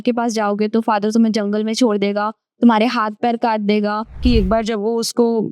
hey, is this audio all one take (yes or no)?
no